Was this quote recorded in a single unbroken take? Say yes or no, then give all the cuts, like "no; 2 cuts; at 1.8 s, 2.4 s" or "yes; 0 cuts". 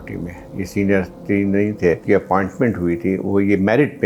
no; 1 cut; at 2.0 s